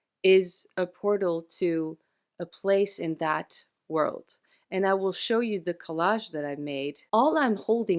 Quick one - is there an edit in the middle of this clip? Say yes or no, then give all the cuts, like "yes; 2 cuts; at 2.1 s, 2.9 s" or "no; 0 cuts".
yes; 1 cut; at 7.0 s